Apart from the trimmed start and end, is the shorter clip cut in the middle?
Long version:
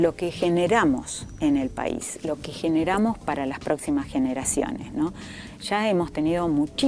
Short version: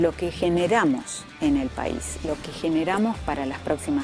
no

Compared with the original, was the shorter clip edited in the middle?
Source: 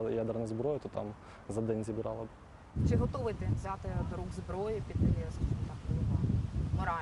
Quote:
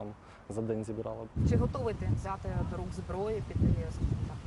yes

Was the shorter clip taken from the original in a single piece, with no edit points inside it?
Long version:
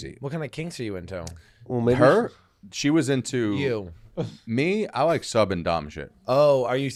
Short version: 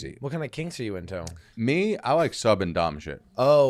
no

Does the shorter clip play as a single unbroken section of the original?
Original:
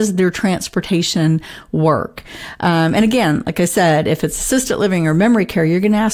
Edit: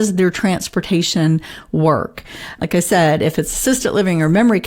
no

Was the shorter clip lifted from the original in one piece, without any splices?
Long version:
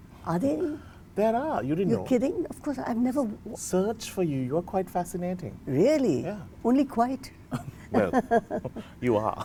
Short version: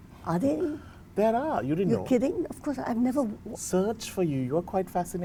yes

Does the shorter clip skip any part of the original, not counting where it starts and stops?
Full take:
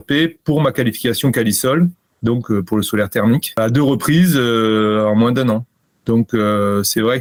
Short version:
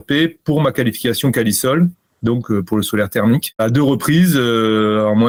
no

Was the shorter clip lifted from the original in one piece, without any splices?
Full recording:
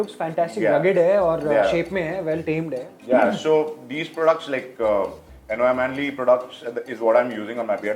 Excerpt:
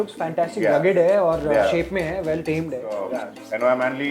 no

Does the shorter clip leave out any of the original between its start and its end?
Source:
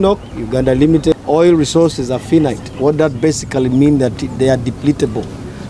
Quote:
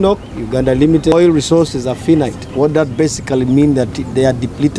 yes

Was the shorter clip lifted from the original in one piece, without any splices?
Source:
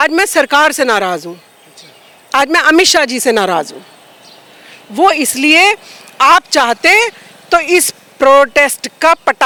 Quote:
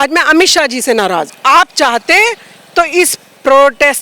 no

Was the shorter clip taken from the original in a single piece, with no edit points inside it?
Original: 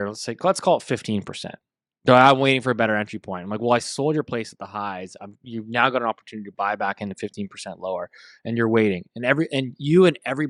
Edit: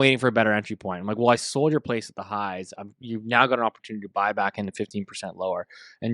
yes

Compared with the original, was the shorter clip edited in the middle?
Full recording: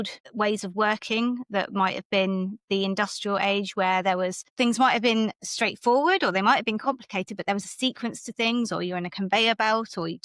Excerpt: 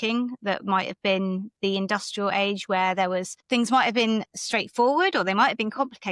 no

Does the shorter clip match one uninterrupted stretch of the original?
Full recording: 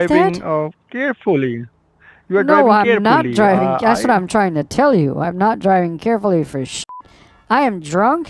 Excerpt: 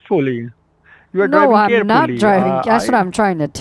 yes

